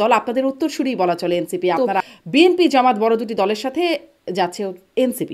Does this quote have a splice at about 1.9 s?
yes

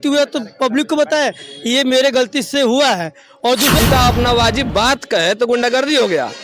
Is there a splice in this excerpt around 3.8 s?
yes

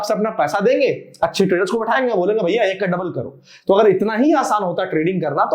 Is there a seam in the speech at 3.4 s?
no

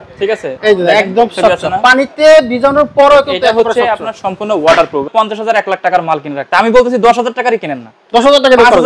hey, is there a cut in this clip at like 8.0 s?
no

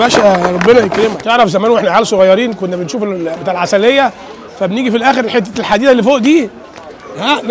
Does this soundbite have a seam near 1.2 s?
yes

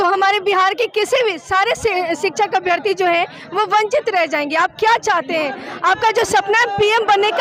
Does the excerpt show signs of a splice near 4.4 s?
no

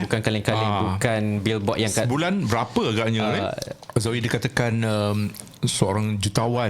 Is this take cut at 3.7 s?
yes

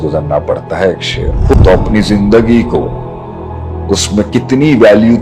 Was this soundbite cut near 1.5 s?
yes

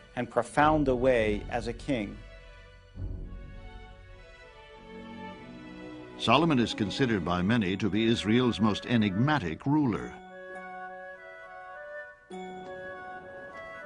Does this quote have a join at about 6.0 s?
no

